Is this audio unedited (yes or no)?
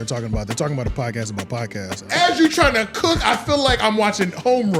no